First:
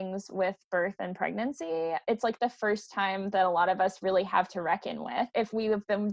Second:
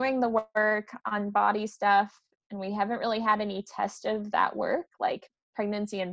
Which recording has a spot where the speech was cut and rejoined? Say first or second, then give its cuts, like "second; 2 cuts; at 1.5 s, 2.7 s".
first; 2 cuts; at 2.0 s, 5.3 s